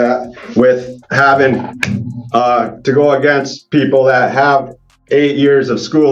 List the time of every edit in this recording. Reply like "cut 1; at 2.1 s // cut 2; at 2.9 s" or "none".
none